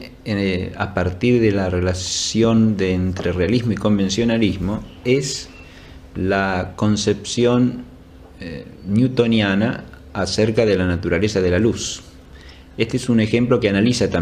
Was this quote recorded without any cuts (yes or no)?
no